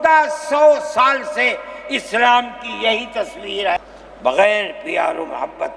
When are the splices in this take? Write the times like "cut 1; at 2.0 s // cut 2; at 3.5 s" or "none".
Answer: cut 1; at 3.8 s